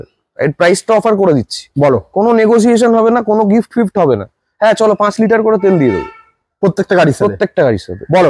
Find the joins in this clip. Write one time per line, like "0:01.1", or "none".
none